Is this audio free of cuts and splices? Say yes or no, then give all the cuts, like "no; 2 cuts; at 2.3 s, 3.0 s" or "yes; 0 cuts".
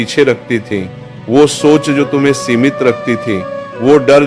yes; 0 cuts